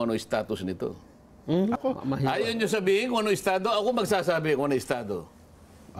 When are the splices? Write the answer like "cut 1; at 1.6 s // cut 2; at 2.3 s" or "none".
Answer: cut 1; at 1.8 s